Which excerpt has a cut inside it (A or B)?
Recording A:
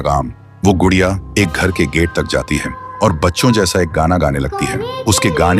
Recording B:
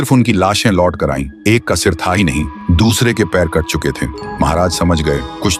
A